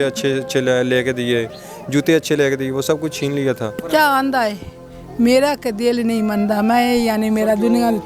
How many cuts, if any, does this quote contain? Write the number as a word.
one